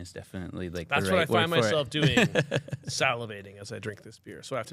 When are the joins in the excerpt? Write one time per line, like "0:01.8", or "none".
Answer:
none